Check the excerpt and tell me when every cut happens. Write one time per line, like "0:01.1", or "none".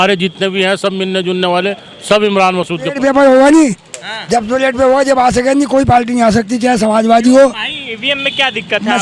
0:03.0